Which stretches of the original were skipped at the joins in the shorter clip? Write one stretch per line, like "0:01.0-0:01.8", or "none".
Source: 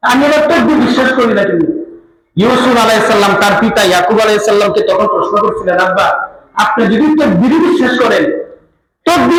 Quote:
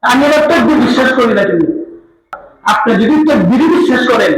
0:02.3-0:06.2